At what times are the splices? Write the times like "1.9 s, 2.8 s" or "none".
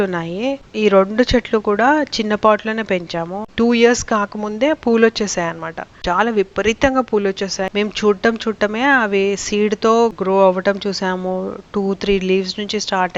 3.4 s, 7.7 s